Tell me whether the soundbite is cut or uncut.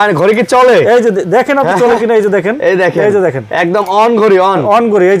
uncut